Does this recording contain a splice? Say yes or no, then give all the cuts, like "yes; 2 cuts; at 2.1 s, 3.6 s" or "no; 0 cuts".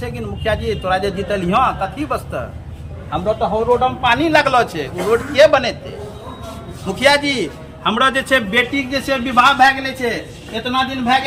no; 0 cuts